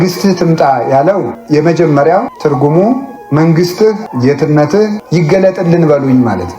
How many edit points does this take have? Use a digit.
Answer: 5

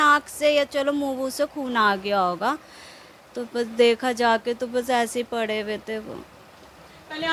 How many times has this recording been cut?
0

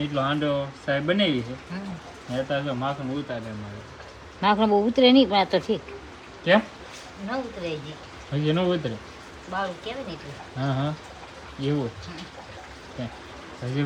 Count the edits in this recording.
0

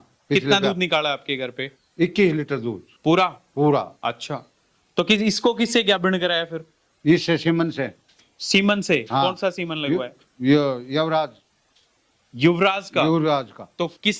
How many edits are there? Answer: 0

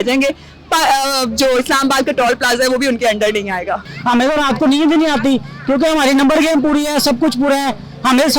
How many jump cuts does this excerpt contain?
1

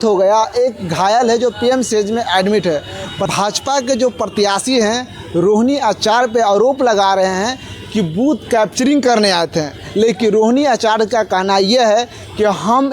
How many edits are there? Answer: 1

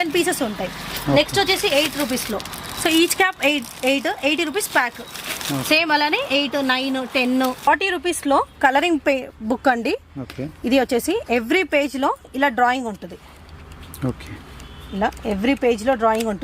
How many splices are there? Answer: 1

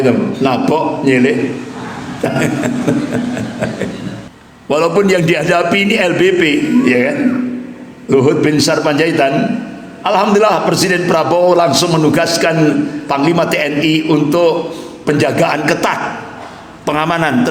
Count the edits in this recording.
1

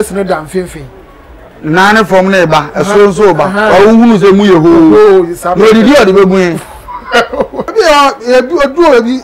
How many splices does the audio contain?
1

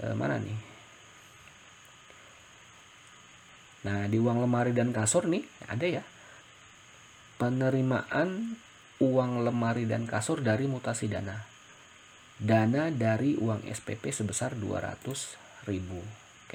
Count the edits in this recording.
0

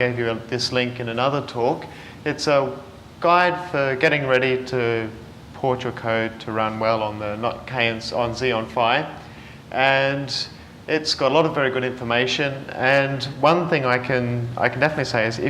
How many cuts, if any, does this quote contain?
1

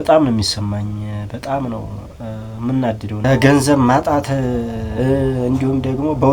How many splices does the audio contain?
1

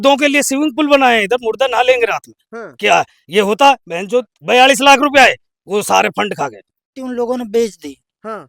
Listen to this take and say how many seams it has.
1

